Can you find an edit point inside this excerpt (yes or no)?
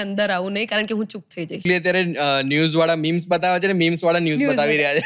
yes